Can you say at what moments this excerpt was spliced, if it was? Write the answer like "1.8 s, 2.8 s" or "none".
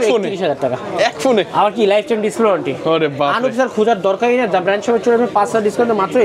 none